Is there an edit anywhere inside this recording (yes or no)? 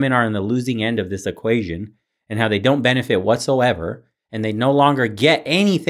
no